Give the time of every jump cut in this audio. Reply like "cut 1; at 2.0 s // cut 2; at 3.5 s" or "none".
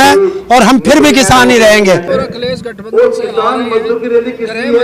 cut 1; at 2.1 s